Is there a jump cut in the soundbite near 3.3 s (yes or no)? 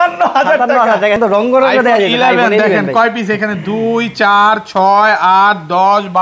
no